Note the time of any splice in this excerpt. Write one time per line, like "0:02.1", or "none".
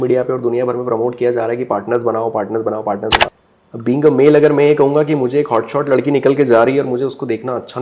0:03.3